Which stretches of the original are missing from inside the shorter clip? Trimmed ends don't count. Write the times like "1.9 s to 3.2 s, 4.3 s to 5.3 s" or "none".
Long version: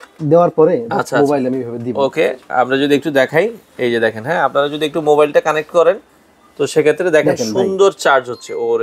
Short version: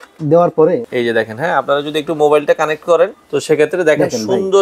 0.8 s to 3.7 s, 6.1 s to 6.5 s